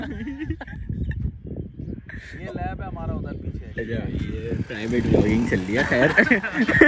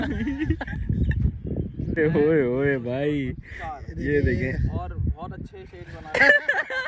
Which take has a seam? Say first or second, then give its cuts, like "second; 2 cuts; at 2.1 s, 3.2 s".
second; 1 cut; at 2.0 s